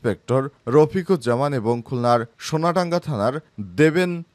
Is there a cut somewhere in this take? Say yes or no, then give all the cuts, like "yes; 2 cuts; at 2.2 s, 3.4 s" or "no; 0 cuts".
no; 0 cuts